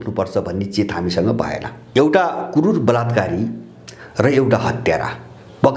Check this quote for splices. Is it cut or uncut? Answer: cut